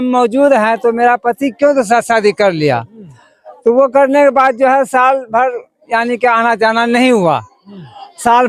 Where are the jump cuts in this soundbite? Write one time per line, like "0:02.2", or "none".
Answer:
none